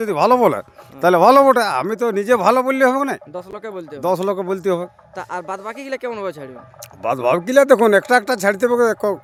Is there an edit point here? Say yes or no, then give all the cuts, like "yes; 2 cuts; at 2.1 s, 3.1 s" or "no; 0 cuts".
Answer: no; 0 cuts